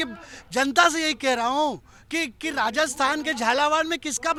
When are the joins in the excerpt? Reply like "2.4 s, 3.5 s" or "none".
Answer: none